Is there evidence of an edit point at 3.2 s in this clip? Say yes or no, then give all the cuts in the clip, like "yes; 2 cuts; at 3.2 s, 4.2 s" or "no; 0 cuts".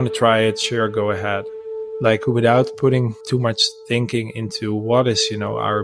yes; 2 cuts; at 1.6 s, 3.2 s